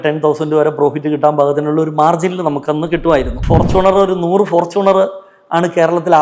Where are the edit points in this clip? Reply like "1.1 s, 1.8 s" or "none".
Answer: 3.4 s